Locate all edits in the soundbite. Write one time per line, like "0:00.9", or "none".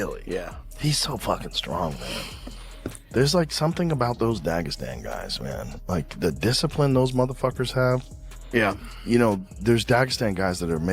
0:09.5